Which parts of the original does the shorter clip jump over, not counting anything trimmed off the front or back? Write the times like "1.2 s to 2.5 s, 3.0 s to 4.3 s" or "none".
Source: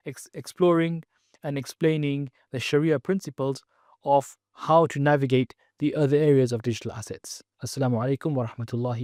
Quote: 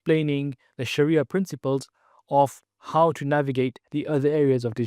5.6 s to 5.7 s